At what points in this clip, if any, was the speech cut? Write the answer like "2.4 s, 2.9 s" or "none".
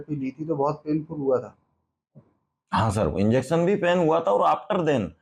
none